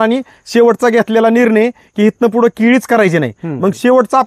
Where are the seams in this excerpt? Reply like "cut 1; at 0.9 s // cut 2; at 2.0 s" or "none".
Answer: none